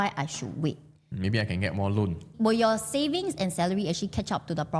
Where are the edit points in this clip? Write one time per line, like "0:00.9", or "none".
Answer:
0:02.2